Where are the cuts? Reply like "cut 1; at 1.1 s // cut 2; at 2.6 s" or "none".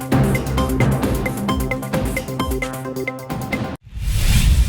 cut 1; at 3.8 s